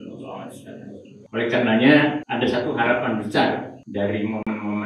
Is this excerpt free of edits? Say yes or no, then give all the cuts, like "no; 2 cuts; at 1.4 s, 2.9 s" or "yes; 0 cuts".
no; 3 cuts; at 1.1 s, 2.2 s, 3.8 s